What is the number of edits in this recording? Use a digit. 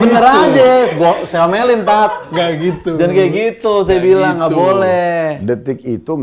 0